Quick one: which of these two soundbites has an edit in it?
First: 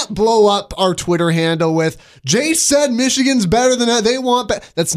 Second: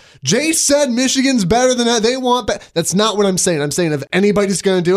second; 1 cut; at 4.0 s

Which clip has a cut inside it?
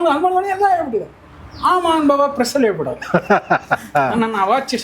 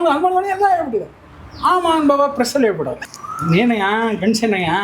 second; 1 cut; at 3.0 s

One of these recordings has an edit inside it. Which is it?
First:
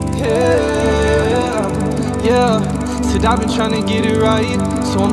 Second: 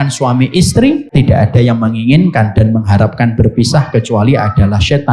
second; 1 cut; at 1.0 s

